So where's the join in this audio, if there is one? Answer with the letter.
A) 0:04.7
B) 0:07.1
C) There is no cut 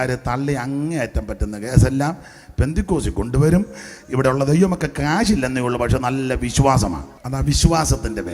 B